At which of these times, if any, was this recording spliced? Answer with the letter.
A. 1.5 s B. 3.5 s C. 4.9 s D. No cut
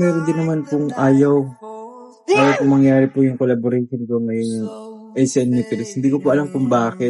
D